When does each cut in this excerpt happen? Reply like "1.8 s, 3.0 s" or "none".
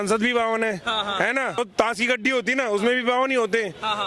1.6 s